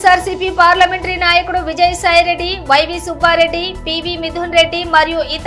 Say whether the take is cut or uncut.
uncut